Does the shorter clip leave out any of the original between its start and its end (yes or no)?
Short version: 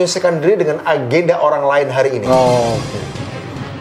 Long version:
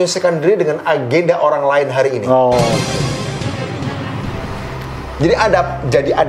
yes